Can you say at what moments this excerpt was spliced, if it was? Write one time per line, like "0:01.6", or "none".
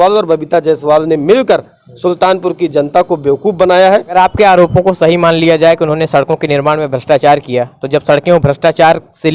0:04.1